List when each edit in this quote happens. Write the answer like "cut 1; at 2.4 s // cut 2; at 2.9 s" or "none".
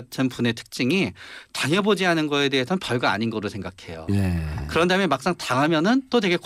none